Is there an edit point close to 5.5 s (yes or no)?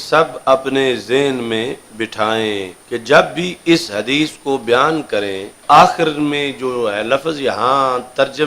yes